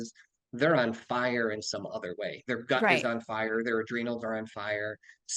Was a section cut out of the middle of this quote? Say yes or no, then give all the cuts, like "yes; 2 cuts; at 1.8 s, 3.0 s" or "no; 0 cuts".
no; 0 cuts